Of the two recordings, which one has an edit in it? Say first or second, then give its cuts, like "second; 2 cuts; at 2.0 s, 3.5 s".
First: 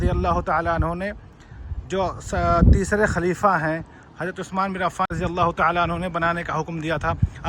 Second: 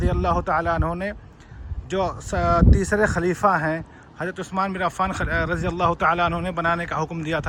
first; 1 cut; at 5.1 s